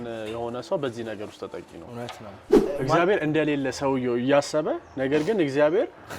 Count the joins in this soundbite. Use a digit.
1